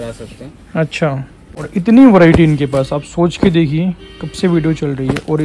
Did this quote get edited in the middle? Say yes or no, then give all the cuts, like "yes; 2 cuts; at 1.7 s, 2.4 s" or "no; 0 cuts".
yes; 1 cut; at 1.7 s